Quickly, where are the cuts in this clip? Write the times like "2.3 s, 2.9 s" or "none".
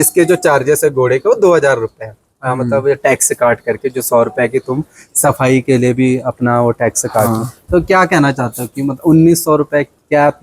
none